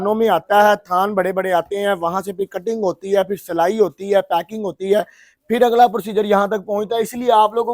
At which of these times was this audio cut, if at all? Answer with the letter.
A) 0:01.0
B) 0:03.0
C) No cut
C